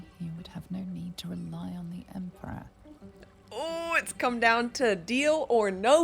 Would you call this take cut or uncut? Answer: cut